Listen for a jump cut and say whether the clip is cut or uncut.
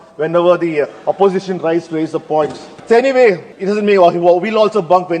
cut